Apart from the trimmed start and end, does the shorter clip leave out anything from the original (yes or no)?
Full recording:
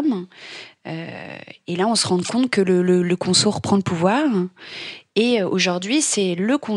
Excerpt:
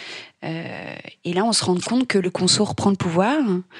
yes